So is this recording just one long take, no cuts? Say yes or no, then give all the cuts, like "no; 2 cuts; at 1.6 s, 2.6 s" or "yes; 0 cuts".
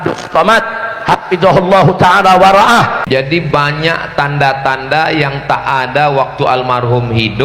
no; 1 cut; at 3.0 s